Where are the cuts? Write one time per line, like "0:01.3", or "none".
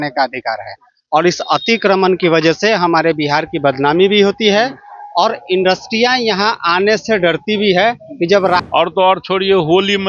0:08.6